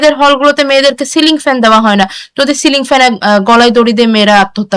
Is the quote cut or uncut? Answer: uncut